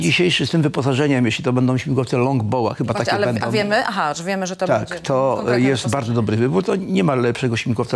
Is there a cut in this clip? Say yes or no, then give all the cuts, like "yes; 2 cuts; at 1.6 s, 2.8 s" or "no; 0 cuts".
no; 0 cuts